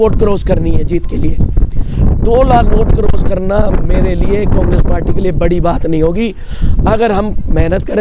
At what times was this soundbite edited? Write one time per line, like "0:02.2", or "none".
none